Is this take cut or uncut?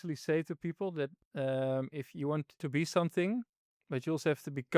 cut